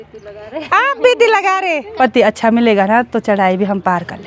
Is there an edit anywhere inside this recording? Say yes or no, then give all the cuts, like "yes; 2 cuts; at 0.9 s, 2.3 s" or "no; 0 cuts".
yes; 1 cut; at 1.8 s